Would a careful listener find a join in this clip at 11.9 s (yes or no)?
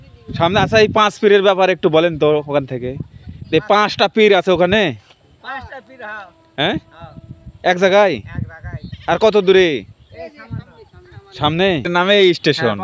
yes